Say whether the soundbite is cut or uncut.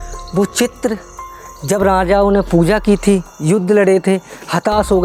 uncut